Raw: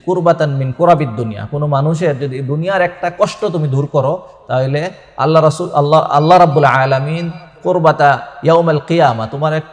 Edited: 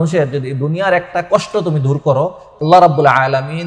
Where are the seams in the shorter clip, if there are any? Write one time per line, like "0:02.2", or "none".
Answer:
0:02.6